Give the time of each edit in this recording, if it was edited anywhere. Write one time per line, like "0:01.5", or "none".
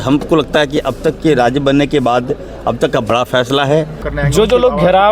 0:04.1